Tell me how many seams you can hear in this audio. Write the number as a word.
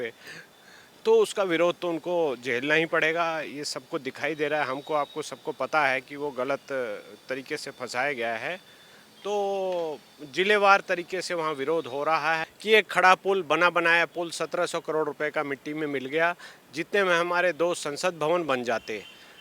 one